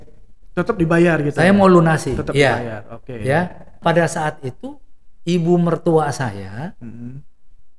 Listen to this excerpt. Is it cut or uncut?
cut